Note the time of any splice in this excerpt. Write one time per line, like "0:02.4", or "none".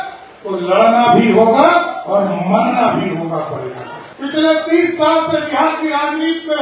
0:04.0